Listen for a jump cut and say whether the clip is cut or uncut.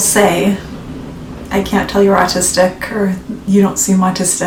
uncut